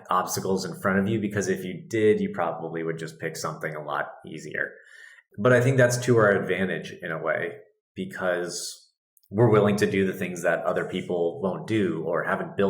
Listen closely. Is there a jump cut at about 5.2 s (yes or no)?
yes